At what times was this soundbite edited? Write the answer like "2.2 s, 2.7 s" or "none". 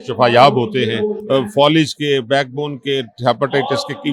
1.2 s